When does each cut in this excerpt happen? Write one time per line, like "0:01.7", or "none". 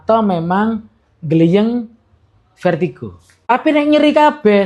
0:03.5